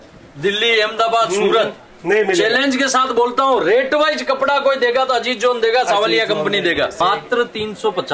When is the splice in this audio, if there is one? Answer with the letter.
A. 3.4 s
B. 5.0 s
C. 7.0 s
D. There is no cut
C